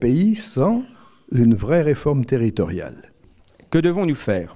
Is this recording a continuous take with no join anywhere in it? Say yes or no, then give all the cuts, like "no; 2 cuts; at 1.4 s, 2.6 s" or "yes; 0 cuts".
yes; 0 cuts